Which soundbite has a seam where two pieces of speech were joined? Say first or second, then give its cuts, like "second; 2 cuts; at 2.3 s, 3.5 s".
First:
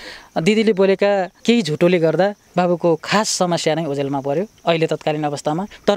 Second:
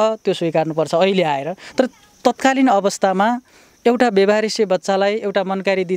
first; 3 cuts; at 1.3 s, 2.4 s, 4.5 s